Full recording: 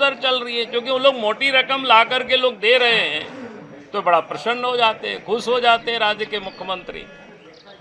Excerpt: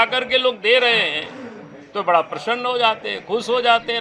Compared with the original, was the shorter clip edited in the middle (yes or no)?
no